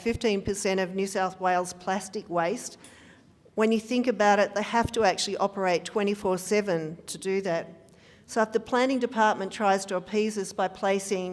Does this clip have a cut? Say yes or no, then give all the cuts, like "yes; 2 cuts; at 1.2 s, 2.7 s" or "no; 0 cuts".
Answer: no; 0 cuts